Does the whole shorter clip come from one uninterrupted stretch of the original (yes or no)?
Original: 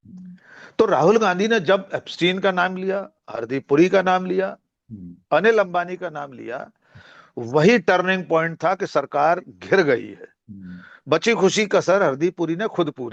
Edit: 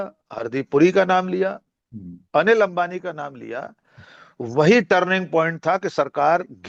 yes